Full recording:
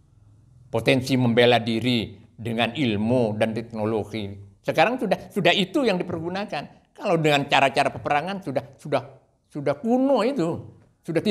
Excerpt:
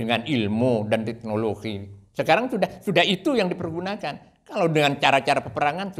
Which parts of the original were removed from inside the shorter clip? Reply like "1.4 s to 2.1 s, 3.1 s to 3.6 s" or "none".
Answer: none